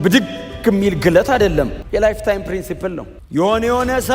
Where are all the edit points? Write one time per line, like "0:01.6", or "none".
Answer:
0:01.8
0:03.1